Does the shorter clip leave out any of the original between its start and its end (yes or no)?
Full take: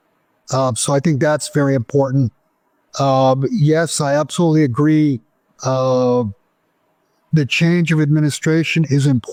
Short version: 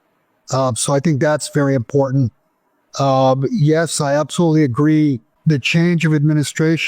yes